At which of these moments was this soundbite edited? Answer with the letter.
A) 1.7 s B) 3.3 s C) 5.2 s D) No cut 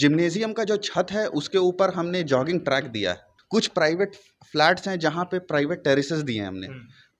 B